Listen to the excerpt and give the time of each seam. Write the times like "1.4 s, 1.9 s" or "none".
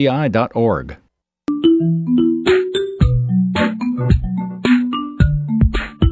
1.5 s